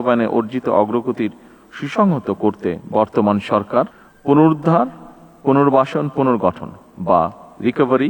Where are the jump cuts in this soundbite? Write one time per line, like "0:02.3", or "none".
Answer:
0:04.0